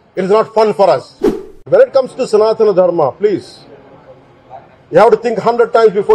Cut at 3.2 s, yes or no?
no